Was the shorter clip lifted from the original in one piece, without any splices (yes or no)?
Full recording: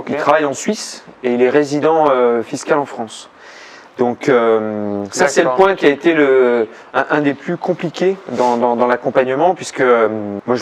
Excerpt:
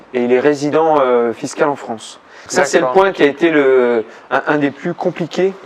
no